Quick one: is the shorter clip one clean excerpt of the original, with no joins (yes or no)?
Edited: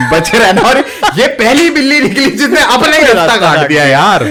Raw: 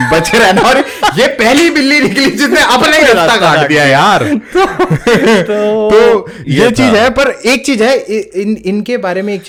yes